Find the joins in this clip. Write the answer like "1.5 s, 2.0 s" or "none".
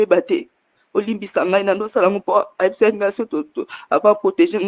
none